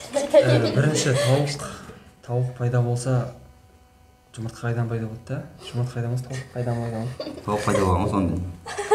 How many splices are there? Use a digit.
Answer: 0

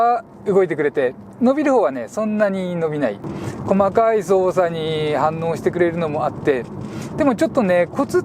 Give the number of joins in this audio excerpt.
1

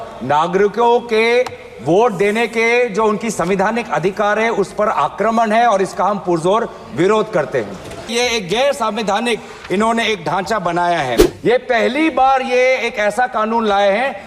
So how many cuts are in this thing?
2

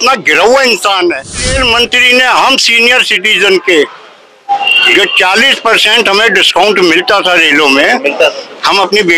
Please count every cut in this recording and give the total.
1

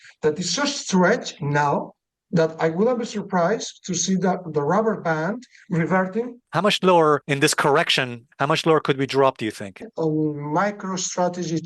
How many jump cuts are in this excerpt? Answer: 2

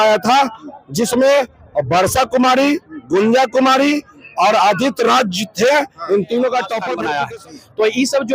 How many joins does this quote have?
1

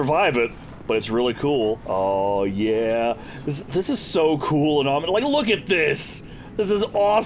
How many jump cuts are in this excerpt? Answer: 1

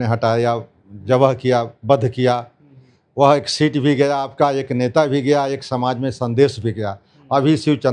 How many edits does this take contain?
0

